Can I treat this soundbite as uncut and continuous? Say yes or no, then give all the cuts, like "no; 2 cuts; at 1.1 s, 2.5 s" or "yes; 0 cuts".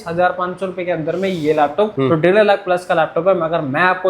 no; 1 cut; at 1.9 s